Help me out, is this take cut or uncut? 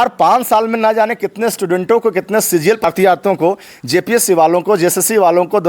cut